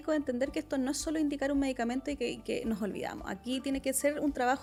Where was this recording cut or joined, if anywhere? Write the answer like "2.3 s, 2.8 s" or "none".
none